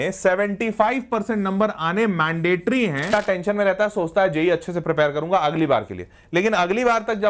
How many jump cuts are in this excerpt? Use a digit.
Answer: 1